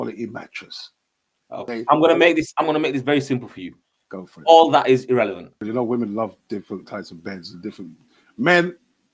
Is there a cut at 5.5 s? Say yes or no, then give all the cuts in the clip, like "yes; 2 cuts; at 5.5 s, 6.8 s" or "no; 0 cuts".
yes; 2 cuts; at 1.6 s, 5.5 s